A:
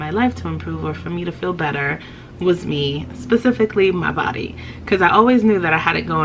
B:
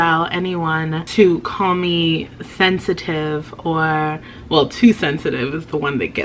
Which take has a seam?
B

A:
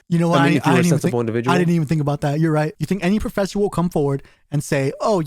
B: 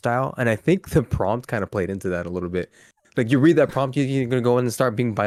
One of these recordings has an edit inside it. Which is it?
A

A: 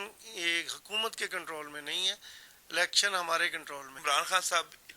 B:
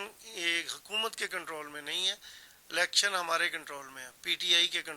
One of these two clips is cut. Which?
A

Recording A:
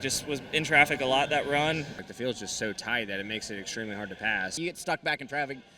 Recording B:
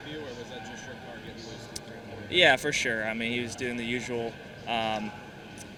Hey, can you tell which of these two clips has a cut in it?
A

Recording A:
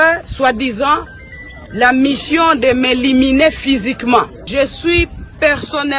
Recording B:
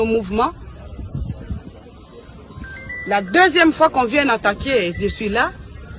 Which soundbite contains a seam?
A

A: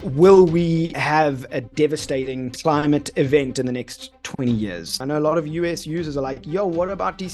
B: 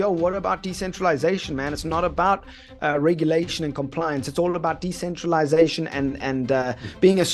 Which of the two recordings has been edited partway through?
A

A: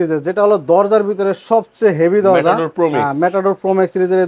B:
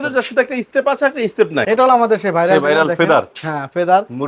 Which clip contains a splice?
B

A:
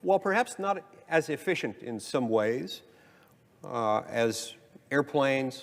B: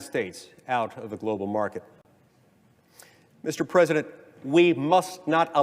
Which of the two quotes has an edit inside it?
B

